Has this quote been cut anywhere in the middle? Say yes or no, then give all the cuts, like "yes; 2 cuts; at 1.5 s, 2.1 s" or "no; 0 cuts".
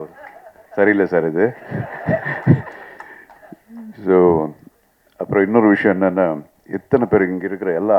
no; 0 cuts